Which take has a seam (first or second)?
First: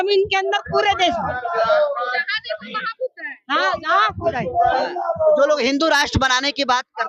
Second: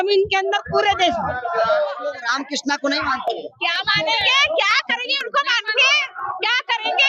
second